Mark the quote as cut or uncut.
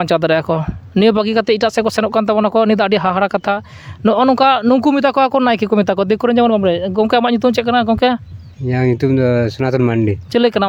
uncut